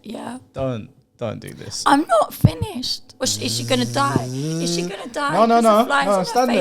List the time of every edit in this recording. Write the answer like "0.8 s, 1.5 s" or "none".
3.0 s